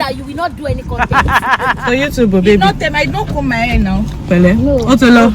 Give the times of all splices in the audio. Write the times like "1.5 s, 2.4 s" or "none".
1.8 s